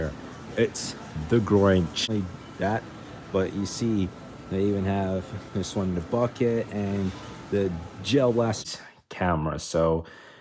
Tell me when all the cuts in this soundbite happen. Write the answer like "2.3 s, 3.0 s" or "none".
2.1 s, 8.6 s